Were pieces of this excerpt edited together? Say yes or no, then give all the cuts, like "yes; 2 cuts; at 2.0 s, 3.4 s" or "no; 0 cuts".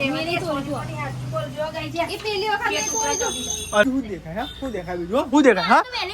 yes; 1 cut; at 3.8 s